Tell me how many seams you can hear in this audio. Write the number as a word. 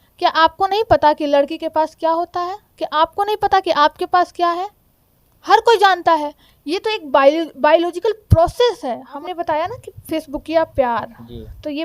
one